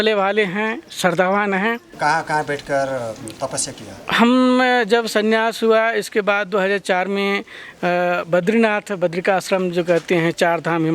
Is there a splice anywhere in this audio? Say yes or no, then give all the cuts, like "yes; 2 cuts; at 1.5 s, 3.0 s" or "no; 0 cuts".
yes; 1 cut; at 1.9 s